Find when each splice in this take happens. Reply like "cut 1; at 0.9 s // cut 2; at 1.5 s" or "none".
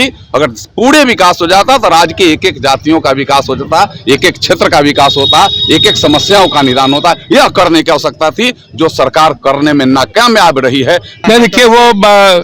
cut 1; at 11.2 s